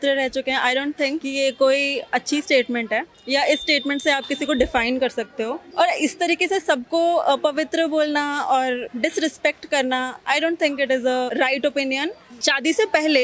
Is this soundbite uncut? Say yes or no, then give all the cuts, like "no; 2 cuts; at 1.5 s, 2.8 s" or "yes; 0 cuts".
no; 6 cuts; at 1.2 s, 3.1 s, 5.6 s, 8.9 s, 11.3 s, 12.3 s